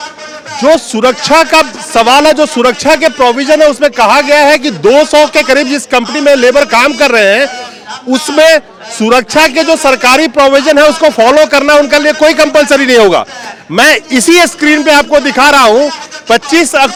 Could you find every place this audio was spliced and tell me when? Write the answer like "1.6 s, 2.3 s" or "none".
none